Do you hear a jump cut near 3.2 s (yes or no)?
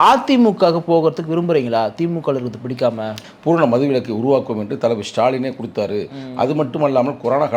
yes